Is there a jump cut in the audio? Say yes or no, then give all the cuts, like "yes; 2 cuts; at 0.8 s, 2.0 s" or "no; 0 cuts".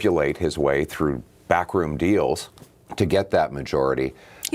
no; 0 cuts